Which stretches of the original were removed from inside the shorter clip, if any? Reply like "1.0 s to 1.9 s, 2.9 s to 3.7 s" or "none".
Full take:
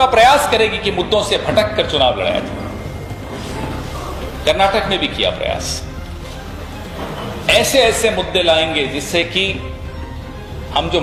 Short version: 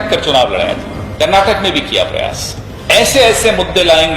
2.6 s to 4.2 s, 6.0 s to 7.3 s